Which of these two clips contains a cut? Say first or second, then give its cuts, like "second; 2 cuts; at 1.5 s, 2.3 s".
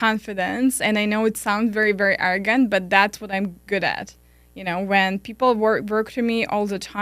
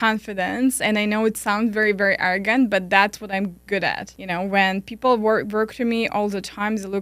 second; 1 cut; at 4.1 s